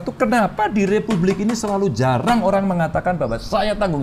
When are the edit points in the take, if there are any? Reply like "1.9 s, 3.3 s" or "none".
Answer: none